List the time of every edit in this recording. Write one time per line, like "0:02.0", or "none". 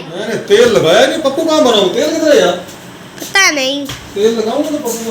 none

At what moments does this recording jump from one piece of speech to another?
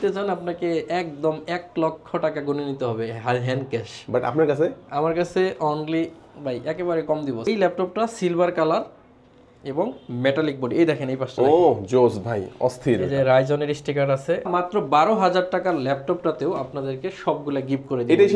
0:07.5
0:14.5

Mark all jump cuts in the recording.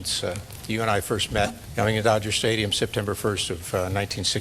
0:01.6

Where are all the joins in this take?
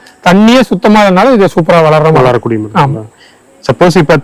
none

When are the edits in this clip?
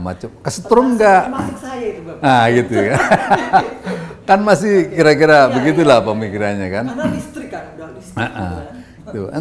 none

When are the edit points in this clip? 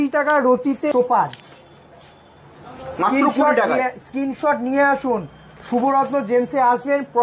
0:00.9

